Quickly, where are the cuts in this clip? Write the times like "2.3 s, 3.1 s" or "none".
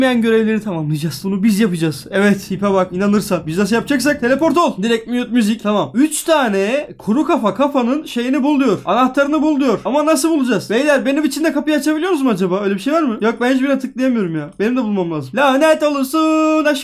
none